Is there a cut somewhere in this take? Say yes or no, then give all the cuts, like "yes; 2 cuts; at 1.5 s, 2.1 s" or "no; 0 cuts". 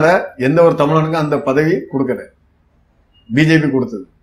no; 0 cuts